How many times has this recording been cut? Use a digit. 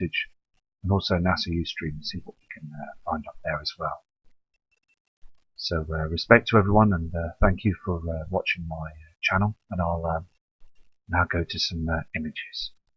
1